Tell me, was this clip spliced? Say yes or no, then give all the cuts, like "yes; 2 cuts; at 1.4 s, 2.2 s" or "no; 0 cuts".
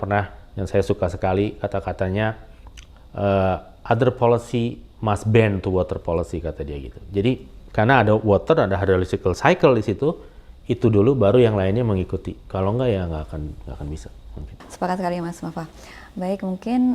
no; 0 cuts